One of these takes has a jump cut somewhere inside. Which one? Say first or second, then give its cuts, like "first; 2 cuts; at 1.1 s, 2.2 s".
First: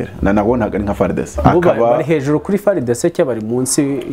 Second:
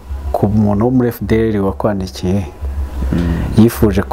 first; 1 cut; at 1.3 s